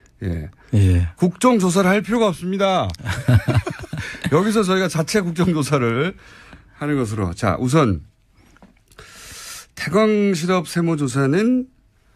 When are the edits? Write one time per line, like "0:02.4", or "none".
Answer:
0:06.6

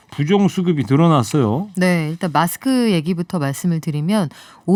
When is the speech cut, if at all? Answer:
none

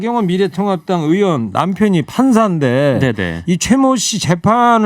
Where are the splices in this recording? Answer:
none

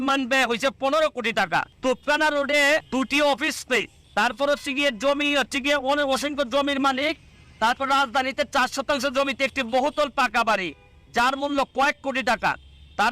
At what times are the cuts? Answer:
0:01.7
0:02.9
0:04.0

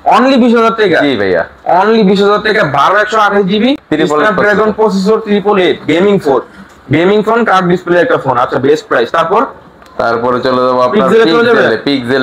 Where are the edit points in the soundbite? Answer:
none

